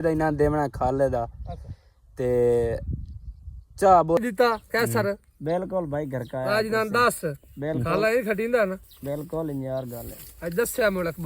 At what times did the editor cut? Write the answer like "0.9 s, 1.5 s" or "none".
4.2 s